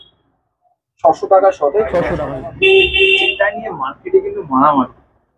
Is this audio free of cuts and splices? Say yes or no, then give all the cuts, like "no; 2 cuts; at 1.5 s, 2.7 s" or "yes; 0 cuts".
no; 1 cut; at 2.1 s